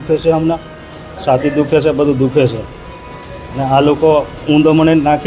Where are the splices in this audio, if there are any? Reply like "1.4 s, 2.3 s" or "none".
none